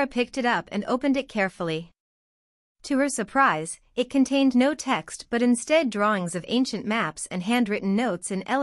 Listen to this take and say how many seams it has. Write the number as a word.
one